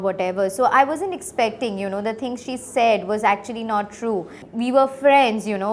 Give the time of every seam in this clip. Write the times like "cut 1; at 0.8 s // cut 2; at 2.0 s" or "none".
cut 1; at 4.4 s